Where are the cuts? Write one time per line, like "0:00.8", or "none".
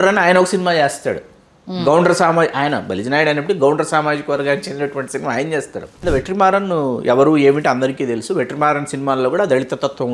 0:06.0